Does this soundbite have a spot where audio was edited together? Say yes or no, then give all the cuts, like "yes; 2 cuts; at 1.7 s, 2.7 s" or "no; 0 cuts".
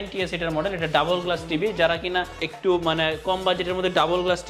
no; 0 cuts